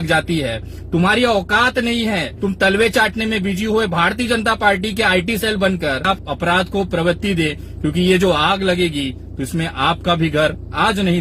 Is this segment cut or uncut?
cut